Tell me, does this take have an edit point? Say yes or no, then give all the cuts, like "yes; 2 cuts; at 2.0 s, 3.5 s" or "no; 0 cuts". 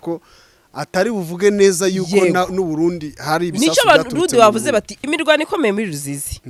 yes; 1 cut; at 4.9 s